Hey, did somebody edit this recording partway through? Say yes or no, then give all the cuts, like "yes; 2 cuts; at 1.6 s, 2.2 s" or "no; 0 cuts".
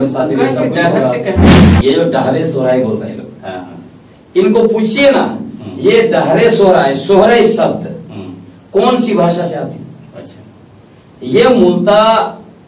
yes; 1 cut; at 1.7 s